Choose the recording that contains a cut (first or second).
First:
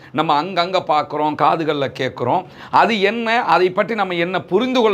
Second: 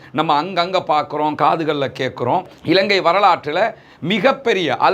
second